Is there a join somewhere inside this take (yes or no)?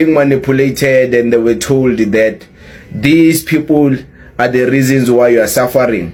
no